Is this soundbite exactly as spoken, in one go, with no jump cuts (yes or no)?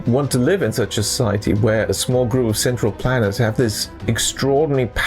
no